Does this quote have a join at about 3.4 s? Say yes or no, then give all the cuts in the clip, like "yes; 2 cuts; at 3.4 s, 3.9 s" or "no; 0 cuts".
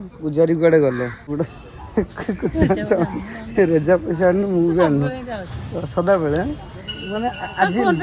no; 1 cut; at 1.3 s